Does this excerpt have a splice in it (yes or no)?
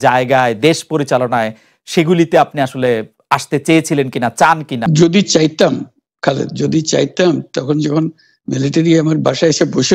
yes